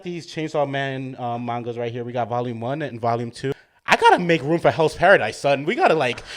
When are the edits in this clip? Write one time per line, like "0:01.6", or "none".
0:03.7